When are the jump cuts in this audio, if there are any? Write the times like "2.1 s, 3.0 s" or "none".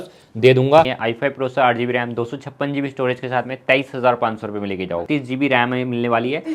0.9 s, 5.0 s